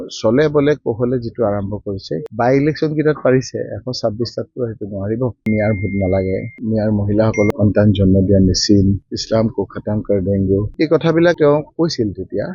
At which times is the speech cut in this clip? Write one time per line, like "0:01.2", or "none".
0:02.3
0:05.4
0:07.5
0:10.7